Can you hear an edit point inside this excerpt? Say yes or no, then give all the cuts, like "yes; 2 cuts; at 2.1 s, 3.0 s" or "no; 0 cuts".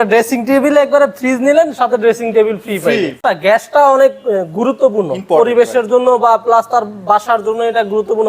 yes; 1 cut; at 3.2 s